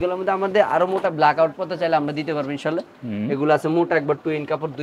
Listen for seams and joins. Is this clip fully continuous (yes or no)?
yes